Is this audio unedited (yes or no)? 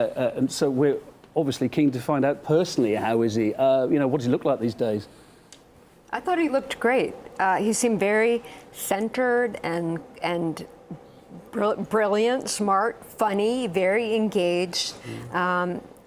no